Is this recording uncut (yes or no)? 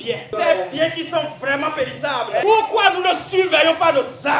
yes